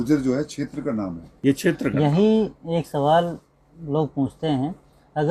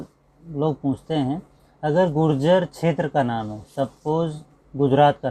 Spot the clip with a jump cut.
first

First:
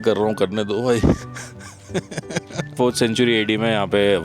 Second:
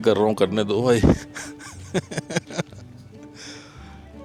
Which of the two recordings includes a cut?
first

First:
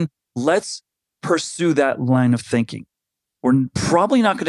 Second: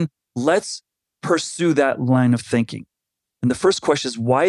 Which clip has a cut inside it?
first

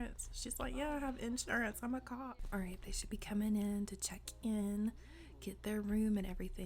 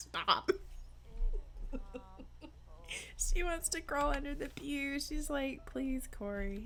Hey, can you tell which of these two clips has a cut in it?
first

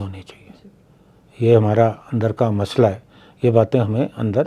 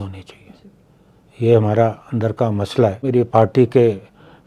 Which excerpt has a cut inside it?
second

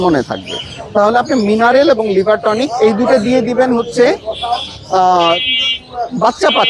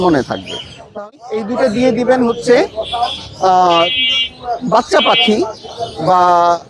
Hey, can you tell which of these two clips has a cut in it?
second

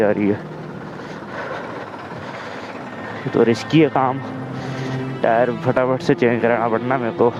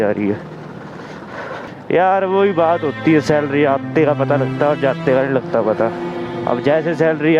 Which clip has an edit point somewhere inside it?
second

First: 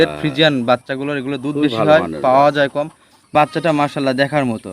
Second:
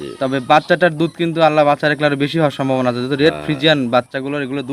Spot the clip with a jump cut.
first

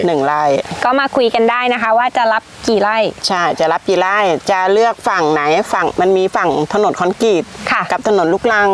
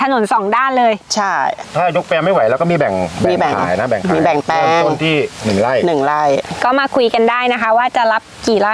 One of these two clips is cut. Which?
second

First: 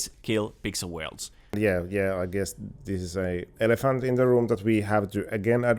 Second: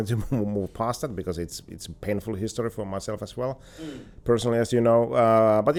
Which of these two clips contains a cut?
first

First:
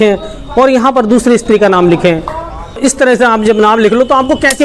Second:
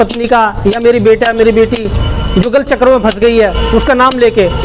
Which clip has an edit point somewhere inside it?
first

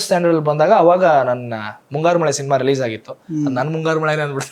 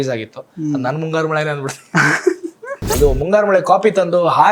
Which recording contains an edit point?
second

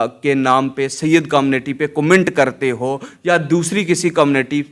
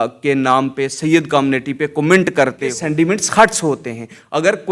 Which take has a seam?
second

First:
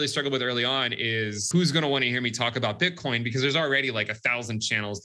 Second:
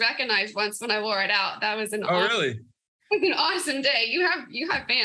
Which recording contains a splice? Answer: first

